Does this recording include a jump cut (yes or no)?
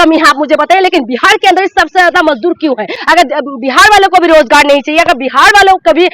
yes